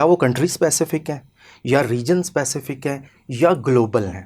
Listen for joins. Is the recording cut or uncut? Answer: uncut